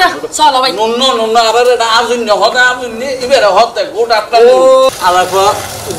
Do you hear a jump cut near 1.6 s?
no; 1 cut; at 4.9 s

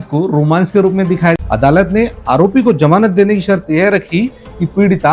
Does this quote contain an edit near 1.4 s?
yes; 1 cut; at 1.4 s

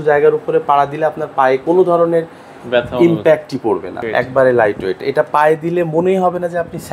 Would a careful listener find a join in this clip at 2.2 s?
no; 1 cut; at 4.0 s

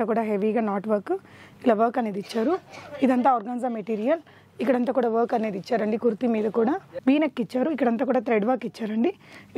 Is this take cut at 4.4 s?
no; 1 cut; at 6.9 s

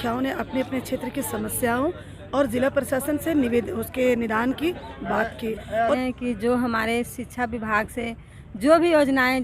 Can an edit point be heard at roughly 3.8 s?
no; 1 cut; at 6.0 s

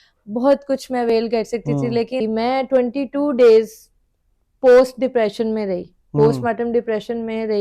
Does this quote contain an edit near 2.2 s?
yes; 1 cut; at 2.2 s

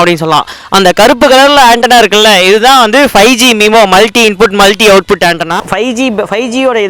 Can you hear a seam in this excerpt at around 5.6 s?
yes; 2 cuts; at 2.3 s, 5.6 s

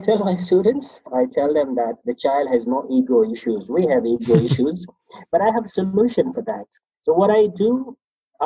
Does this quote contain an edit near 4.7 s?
no; 2 cuts; at 1.0 s, 2.1 s

